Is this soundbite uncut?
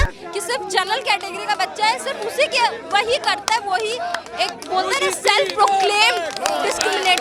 yes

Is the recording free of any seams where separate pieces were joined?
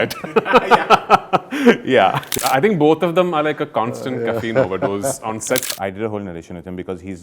no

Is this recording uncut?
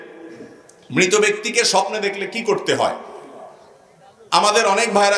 yes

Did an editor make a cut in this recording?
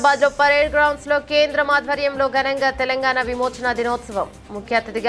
no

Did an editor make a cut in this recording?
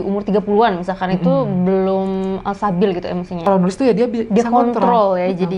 yes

